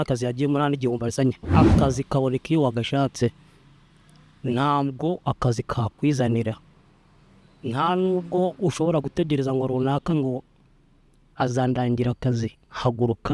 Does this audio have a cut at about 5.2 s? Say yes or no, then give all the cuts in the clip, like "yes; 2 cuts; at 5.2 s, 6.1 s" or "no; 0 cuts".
no; 1 cut; at 1.5 s